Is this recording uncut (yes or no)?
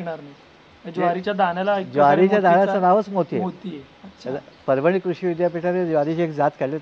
yes